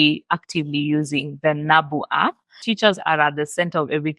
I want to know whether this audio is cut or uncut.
cut